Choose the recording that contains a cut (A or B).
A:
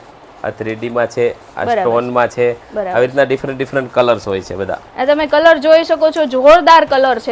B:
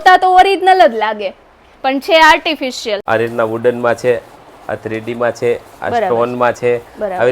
B